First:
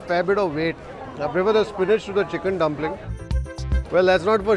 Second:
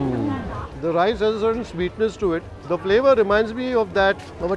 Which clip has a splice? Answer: first; 1 cut; at 3.1 s

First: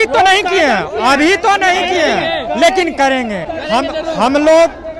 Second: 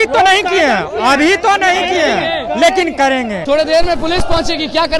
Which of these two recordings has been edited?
second; 1 cut; at 3.4 s

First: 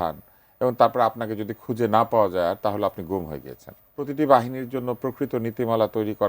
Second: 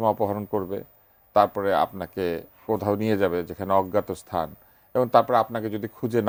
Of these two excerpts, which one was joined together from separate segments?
first; 1 cut; at 4.1 s

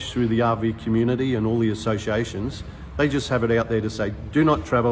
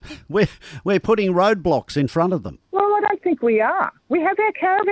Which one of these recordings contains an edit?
second; 1 cut; at 2.5 s

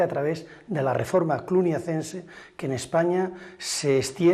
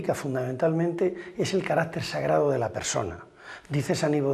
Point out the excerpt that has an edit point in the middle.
first; 1 cut; at 2.6 s

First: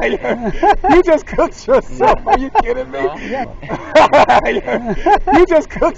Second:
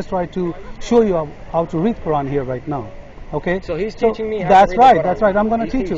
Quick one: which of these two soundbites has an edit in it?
first; 1 cut; at 3.5 s

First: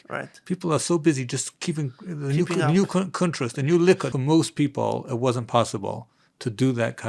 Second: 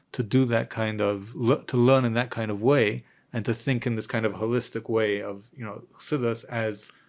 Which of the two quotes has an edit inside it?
first; 1 cut; at 4.1 s

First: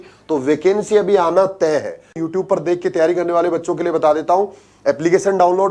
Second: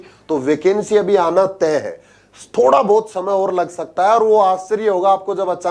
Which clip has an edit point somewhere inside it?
first; 1 cut; at 2.2 s

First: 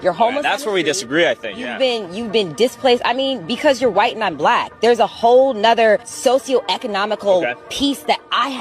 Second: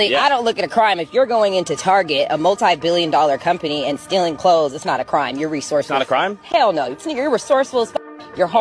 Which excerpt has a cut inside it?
first; 1 cut; at 2.3 s

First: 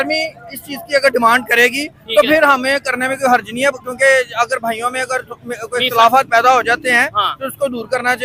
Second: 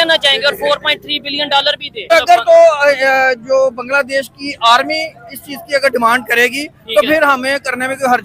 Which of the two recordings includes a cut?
second; 1 cut; at 2.1 s

